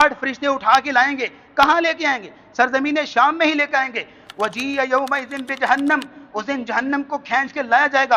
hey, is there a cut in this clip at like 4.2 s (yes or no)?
no